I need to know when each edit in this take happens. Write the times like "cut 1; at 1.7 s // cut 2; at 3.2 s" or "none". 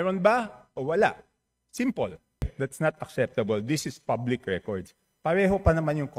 cut 1; at 2.5 s